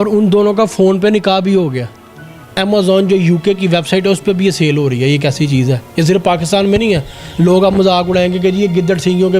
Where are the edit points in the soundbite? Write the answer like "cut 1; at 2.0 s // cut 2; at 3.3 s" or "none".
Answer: cut 1; at 2.5 s